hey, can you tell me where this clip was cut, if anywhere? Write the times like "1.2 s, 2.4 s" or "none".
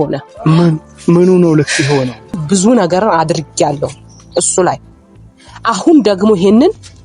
2.4 s